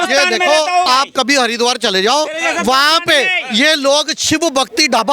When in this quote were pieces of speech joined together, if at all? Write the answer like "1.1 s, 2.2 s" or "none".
none